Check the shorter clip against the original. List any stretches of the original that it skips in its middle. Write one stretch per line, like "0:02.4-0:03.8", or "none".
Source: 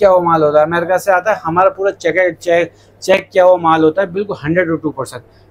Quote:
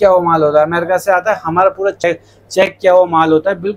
0:02.0-0:02.5